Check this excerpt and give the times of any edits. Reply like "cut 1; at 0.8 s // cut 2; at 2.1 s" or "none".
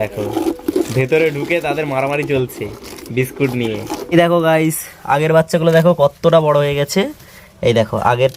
cut 1; at 4.1 s